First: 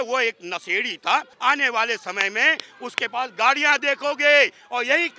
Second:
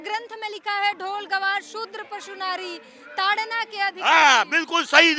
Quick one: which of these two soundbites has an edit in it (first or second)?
first